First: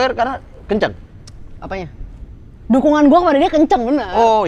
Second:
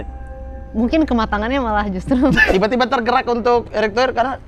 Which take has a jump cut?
second; 1 cut; at 2.5 s

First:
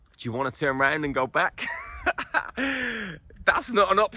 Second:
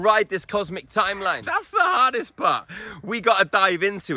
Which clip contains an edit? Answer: second; 1 cut; at 1.4 s

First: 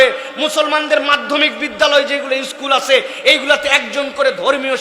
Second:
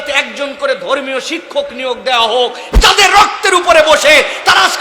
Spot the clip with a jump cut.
second; 1 cut; at 2.7 s

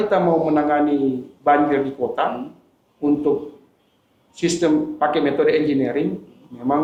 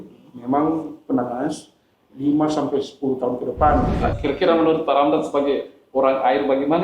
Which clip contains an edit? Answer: second; 1 cut; at 4.2 s

